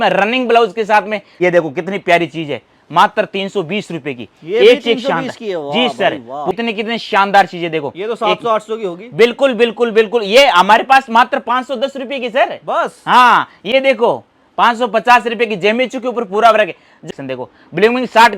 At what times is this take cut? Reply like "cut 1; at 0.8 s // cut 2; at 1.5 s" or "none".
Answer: cut 1; at 1.2 s // cut 2; at 6.5 s // cut 3; at 17.0 s

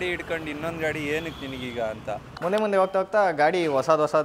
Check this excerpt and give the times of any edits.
cut 1; at 2.3 s

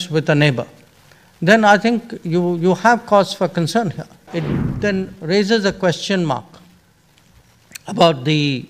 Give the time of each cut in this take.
cut 1; at 4.3 s

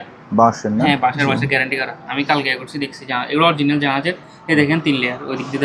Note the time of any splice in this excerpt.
none

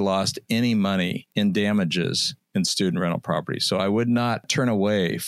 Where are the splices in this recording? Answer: cut 1; at 1.2 s // cut 2; at 4.5 s

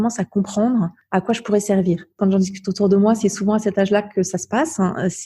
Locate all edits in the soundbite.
cut 1; at 1.0 s // cut 2; at 2.1 s

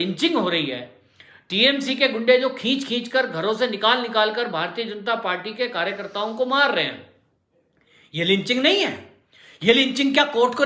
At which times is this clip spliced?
none

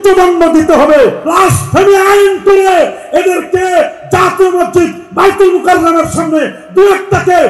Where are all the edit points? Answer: cut 1; at 1.2 s

